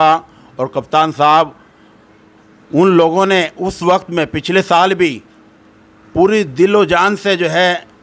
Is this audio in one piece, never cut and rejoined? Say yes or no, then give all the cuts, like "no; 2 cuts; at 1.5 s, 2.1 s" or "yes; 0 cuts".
yes; 0 cuts